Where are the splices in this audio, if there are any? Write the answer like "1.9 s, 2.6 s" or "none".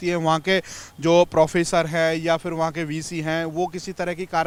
none